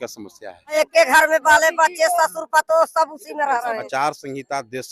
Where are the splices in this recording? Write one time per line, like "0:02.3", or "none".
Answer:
0:00.8
0:03.8